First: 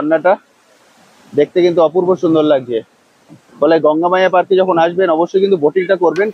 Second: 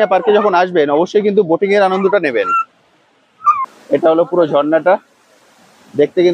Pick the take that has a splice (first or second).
second